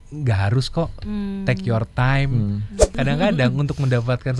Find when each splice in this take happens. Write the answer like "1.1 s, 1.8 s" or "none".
3.0 s